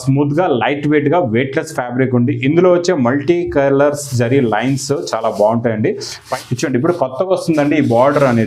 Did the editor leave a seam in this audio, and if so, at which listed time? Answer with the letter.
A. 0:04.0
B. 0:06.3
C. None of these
B